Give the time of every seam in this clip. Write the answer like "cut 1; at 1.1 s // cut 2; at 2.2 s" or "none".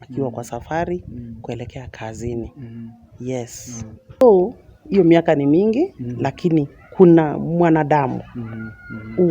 cut 1; at 4.2 s